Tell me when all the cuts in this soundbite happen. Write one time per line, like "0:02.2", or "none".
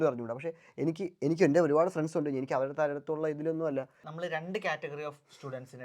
0:04.0